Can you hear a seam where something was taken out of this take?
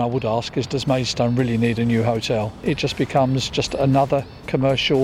yes; 1 cut; at 2.6 s

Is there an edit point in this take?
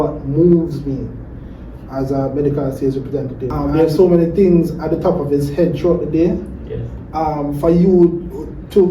yes; 1 cut; at 3.4 s

